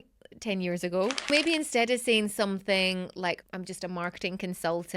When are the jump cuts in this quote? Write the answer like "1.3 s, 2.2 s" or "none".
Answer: 1.3 s, 3.4 s

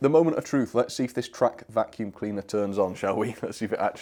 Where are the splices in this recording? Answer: none

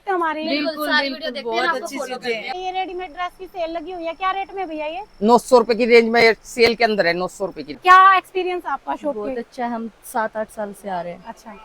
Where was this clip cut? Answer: 2.6 s, 7.8 s

